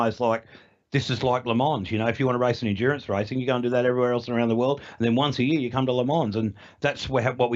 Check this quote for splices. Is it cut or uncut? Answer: uncut